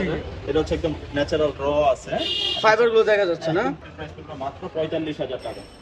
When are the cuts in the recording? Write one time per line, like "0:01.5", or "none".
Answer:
0:03.9

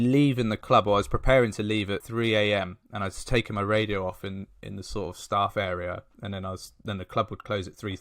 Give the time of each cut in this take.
0:02.0

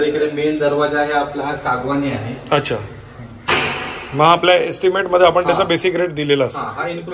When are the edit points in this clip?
none

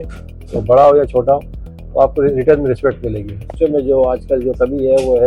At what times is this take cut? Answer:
0:03.5

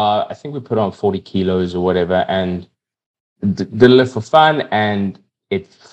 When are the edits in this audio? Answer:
none

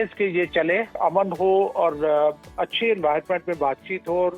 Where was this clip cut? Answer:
0:01.0

